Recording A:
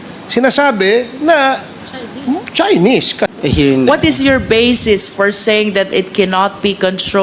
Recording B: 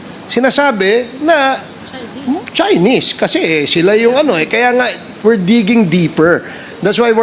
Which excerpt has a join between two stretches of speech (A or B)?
A